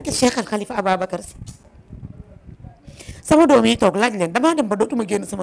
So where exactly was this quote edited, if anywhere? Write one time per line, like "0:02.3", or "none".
none